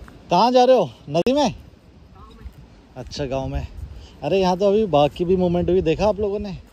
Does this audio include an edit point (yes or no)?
no